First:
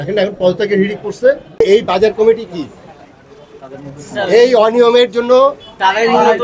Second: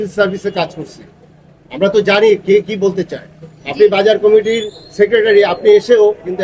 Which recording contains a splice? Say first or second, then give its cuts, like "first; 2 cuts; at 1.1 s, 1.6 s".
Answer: first; 1 cut; at 1.6 s